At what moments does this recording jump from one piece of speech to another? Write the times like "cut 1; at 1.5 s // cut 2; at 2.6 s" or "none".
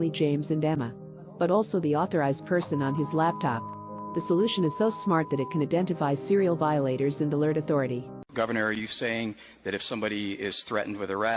cut 1; at 8.3 s